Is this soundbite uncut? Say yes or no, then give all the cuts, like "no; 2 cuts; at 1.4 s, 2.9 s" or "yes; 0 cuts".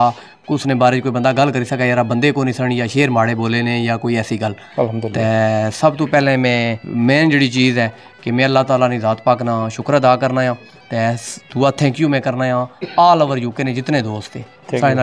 yes; 0 cuts